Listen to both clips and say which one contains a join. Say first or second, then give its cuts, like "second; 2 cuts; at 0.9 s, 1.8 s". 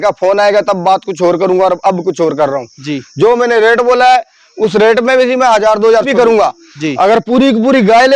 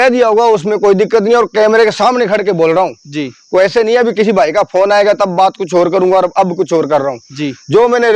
first; 1 cut; at 6.1 s